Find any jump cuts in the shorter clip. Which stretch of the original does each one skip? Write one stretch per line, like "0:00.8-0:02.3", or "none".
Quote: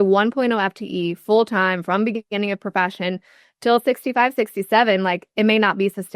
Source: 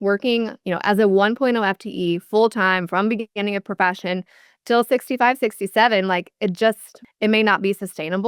0:06.3-0:07.1